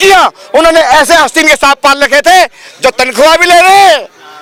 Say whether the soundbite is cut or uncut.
uncut